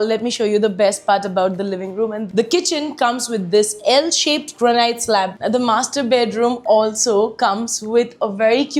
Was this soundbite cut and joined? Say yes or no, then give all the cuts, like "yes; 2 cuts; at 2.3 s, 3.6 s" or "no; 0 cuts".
yes; 2 cuts; at 2.2 s, 5.3 s